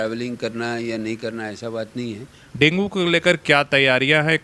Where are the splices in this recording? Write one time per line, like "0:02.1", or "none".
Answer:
0:02.4

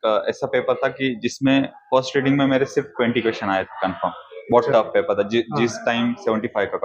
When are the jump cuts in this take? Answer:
none

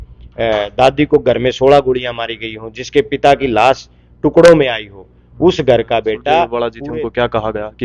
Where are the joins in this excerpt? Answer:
0:06.6

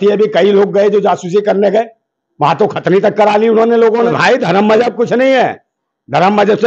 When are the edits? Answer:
0:04.1

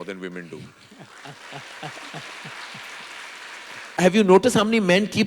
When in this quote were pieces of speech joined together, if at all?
0:04.0

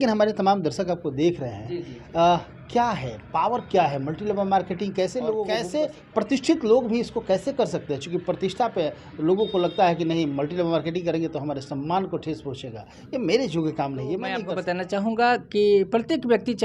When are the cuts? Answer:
0:05.5
0:14.5

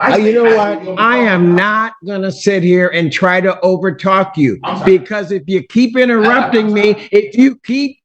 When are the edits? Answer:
none

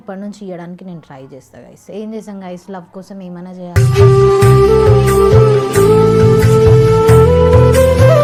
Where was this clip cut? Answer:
none

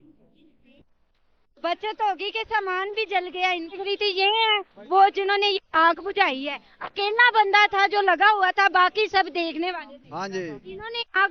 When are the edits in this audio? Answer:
0:03.8

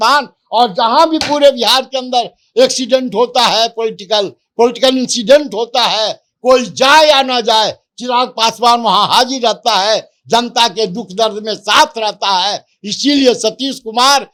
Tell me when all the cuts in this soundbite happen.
none

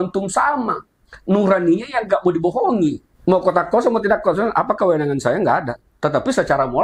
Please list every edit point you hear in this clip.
0:03.1

